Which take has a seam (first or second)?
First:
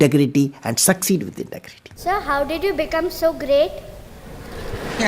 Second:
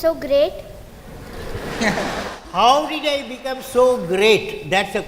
first